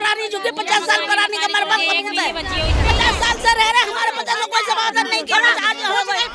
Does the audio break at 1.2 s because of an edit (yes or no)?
no